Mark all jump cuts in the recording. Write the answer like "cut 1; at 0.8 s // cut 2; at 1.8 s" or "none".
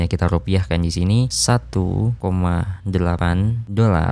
cut 1; at 1.3 s // cut 2; at 3.3 s

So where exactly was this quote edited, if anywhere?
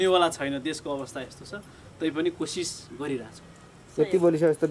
none

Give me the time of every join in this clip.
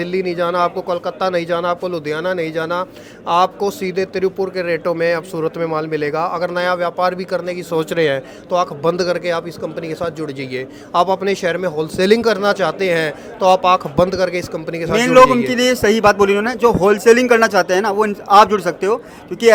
none

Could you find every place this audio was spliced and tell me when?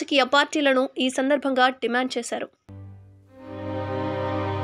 none

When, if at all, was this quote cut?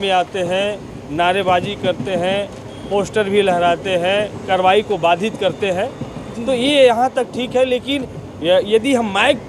cut 1; at 4.4 s

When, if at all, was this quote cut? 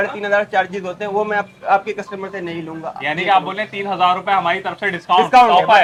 none

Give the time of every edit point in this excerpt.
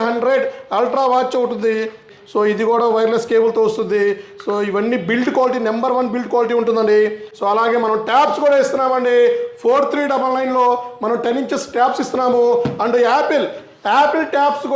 cut 1; at 2.1 s // cut 2; at 7.3 s

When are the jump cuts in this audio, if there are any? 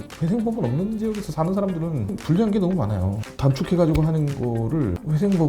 cut 1; at 4.3 s

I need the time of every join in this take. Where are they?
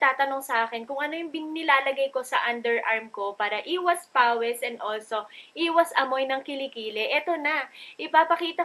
none

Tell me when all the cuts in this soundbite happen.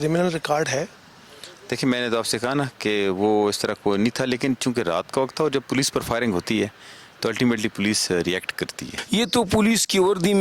cut 1; at 9.0 s

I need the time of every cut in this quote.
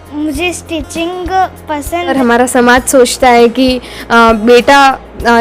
cut 1; at 2.1 s

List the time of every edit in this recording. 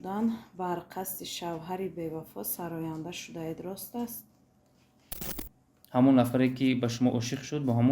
cut 1; at 5.2 s

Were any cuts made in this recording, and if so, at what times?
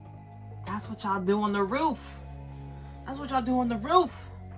none

